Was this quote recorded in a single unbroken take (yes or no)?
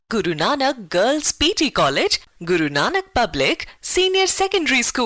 yes